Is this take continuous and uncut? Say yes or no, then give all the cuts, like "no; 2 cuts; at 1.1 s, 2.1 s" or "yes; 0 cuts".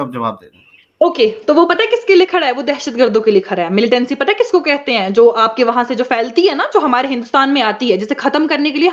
yes; 0 cuts